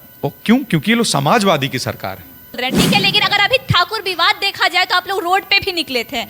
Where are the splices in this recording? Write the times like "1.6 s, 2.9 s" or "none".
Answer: 2.6 s